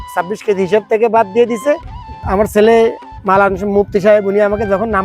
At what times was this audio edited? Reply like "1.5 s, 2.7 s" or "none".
2.2 s